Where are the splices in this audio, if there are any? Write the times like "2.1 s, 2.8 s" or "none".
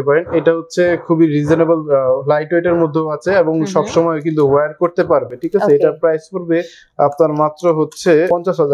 none